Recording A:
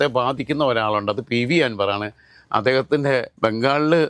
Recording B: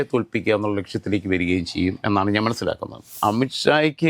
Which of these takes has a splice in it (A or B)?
B